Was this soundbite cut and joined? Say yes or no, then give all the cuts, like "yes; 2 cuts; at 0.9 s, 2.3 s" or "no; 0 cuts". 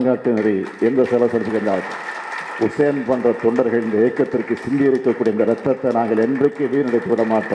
no; 0 cuts